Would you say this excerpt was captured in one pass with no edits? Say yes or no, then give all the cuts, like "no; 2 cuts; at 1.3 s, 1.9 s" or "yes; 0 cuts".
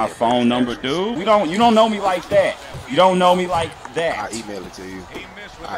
no; 1 cut; at 1.2 s